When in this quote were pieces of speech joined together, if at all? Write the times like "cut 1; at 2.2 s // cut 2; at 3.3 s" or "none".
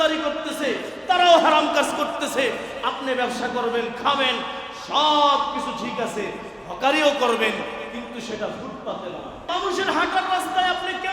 cut 1; at 9.5 s